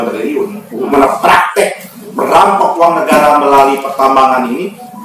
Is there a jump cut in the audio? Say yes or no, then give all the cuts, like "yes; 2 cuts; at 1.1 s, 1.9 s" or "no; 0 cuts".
yes; 1 cut; at 0.9 s